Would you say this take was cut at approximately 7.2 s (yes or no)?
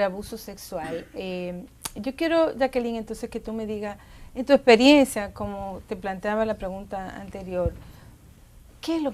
no